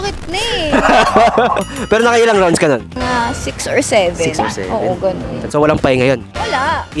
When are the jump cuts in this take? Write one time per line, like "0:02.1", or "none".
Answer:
0:01.6
0:02.9